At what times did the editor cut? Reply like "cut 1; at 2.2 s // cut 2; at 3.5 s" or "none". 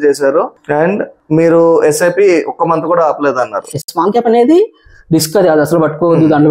cut 1; at 3.7 s